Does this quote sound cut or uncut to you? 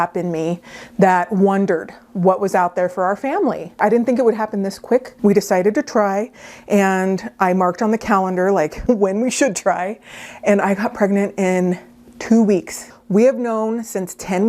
cut